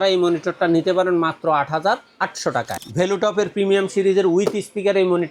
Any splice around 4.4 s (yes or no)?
no